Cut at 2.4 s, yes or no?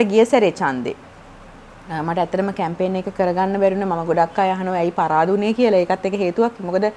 no